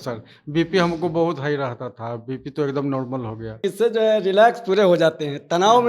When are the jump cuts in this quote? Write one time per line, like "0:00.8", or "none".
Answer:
0:03.6